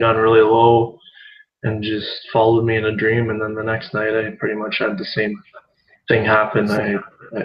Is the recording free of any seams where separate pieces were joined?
no; 1 cut; at 2.3 s

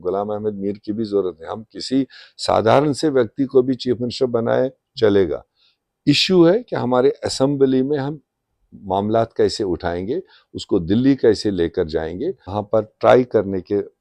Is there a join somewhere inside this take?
yes; 1 cut; at 12.5 s

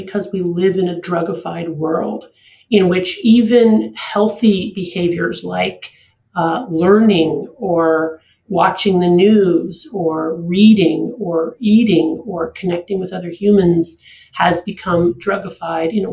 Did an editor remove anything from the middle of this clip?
no; 0 cuts

